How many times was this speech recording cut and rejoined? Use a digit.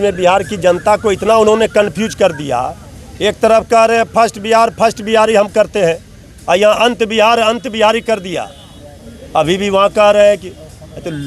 0